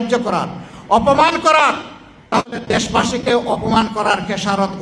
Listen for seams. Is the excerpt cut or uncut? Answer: uncut